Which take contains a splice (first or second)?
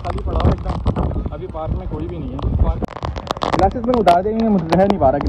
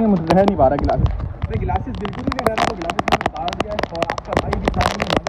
first